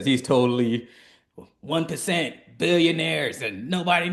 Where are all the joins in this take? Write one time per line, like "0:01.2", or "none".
none